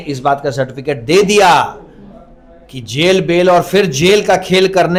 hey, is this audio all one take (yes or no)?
yes